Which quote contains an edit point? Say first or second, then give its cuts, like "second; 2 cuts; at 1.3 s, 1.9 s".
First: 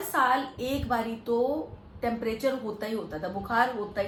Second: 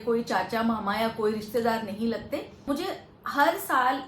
second; 1 cut; at 2.5 s